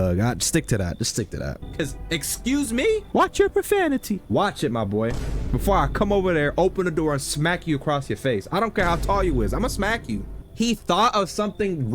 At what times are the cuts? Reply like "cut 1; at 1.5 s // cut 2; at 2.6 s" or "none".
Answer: cut 1; at 1.6 s // cut 2; at 10.4 s